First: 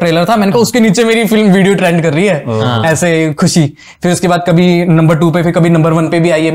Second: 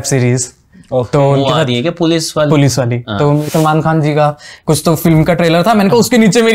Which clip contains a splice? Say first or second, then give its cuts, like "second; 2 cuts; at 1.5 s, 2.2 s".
second; 1 cut; at 3.5 s